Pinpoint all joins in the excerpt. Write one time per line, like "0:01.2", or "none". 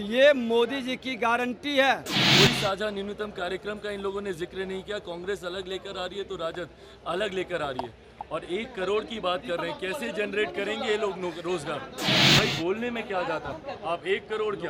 0:02.2
0:12.3